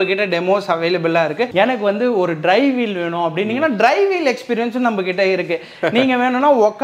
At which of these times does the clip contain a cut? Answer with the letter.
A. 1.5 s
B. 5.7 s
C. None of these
A